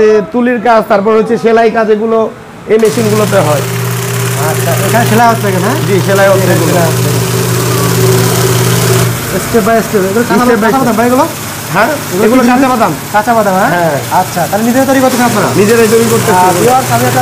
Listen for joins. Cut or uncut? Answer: uncut